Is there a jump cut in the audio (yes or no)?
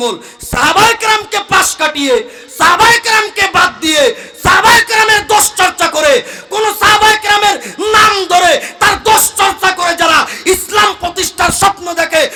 no